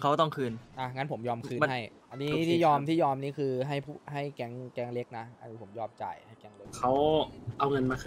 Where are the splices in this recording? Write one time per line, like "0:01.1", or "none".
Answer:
0:01.9
0:06.6